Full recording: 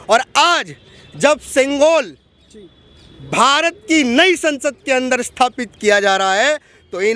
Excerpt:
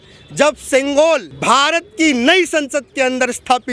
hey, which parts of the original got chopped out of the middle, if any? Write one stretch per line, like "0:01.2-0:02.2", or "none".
0:02.2-0:03.2